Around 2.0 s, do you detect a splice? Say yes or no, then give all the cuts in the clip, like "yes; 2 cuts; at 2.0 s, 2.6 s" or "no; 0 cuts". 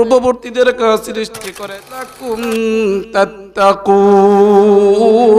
yes; 1 cut; at 2.0 s